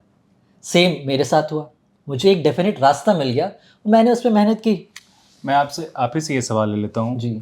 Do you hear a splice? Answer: no; 0 cuts

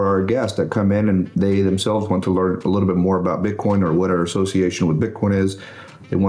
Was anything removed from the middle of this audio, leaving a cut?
no; 0 cuts

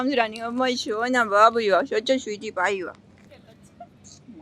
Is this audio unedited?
no; 1 cut; at 3.3 s

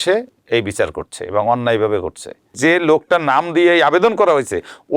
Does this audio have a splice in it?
yes; 1 cut; at 2.5 s

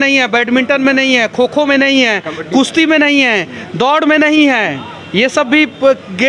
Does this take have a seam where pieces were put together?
no; 0 cuts

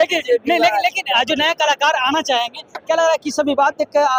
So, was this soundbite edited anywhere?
no; 0 cuts

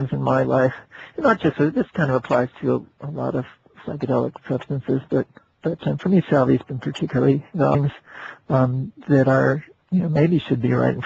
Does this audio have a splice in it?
no; 0 cuts

